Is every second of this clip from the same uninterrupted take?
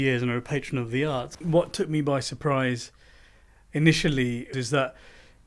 no; 2 cuts; at 1.4 s, 4.5 s

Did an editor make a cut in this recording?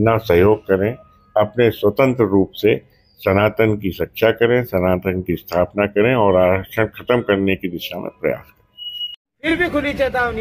yes; 1 cut; at 9.2 s

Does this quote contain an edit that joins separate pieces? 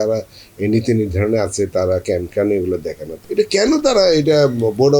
yes; 1 cut; at 3.1 s

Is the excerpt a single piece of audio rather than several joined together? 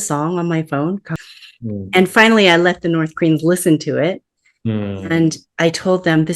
no; 1 cut; at 1.1 s

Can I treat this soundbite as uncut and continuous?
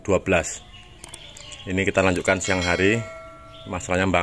yes; 0 cuts

